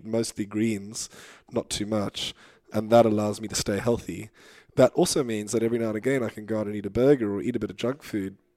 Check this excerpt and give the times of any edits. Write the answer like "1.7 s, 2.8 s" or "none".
2.7 s